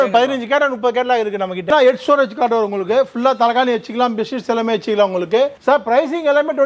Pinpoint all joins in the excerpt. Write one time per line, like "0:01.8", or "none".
0:01.7
0:05.5